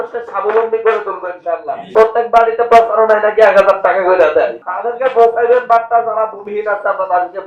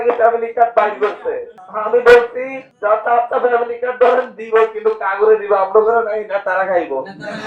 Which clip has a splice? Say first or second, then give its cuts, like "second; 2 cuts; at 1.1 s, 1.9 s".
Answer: first; 2 cuts; at 1.9 s, 4.6 s